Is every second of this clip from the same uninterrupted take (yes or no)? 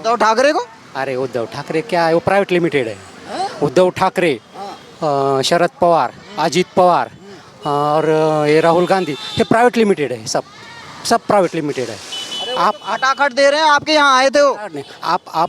yes